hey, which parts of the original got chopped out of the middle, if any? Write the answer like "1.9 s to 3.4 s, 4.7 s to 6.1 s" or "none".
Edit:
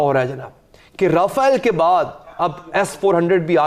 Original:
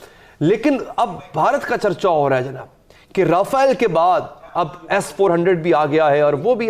none